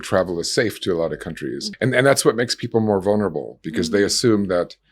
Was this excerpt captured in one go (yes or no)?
no